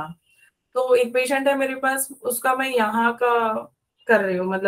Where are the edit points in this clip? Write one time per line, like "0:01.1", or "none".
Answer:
none